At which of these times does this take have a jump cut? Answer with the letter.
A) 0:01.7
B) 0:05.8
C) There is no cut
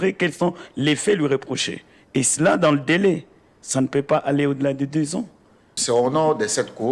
B